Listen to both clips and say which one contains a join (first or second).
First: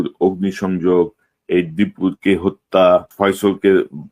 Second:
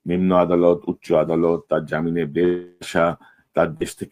first